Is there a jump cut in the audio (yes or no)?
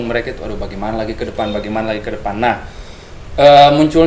no